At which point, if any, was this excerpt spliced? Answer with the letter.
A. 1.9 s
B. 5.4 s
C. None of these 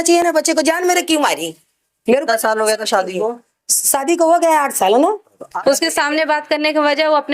B